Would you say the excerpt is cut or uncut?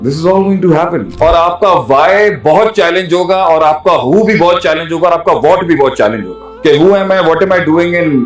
cut